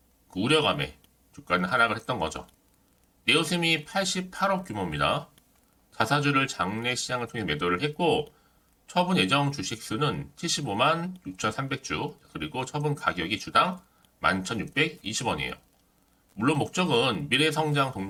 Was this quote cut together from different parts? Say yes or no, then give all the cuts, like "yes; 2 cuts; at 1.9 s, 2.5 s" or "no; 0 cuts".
no; 0 cuts